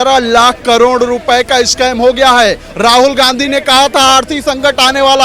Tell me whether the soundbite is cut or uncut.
uncut